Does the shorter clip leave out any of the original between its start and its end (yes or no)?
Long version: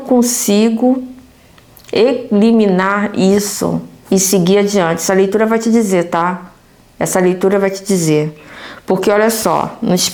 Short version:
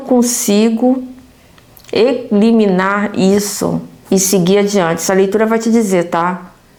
no